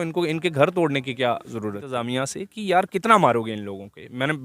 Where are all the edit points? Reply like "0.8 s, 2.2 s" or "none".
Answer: 2.0 s